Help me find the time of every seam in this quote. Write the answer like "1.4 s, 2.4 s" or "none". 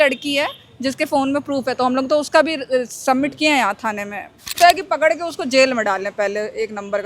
4.5 s